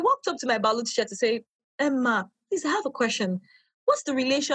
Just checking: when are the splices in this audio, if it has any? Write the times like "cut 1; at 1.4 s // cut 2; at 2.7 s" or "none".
none